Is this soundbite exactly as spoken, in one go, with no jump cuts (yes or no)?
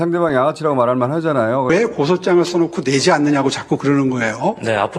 yes